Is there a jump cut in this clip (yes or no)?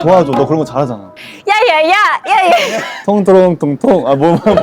yes